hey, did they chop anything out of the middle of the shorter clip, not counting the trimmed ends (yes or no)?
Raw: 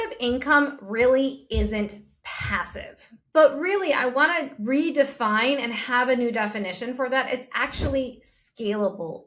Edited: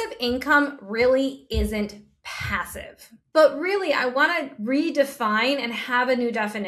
no